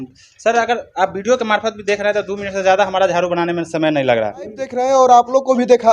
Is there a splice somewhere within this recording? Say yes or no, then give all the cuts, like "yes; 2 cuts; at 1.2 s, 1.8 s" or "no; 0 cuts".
yes; 1 cut; at 4.8 s